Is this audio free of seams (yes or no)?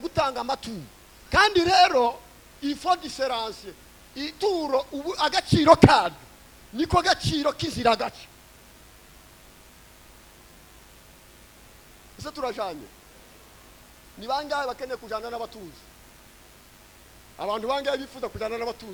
yes